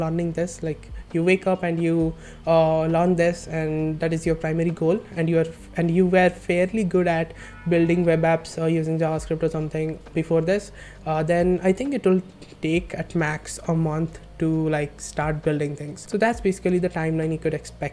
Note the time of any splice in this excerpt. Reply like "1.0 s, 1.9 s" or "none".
none